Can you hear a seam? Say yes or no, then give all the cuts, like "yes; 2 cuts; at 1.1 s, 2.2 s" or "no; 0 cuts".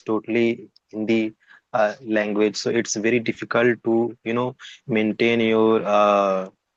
no; 0 cuts